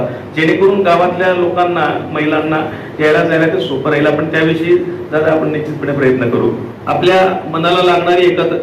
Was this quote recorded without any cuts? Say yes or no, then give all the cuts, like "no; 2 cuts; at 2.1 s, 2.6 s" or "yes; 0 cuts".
no; 1 cut; at 6.7 s